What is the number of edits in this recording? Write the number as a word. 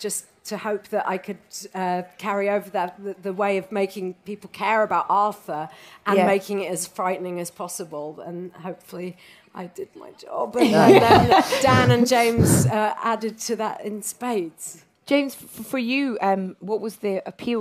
one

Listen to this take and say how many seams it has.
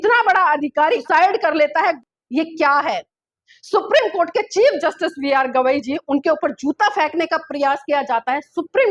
two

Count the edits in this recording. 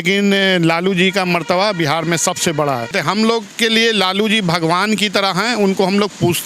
one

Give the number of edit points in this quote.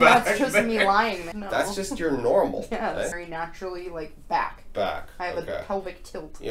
two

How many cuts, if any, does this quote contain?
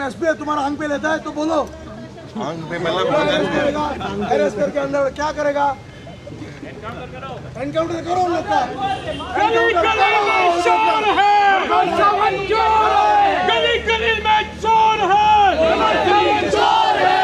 zero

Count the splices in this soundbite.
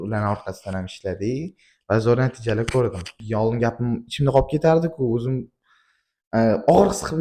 one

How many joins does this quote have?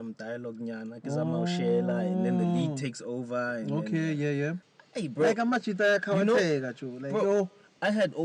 one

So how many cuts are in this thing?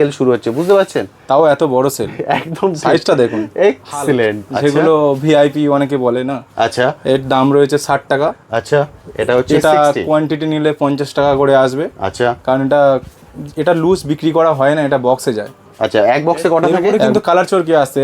two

